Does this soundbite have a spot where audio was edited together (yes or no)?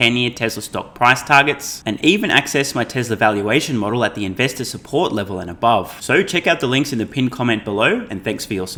no